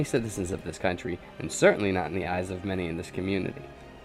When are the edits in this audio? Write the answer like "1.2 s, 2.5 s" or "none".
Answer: none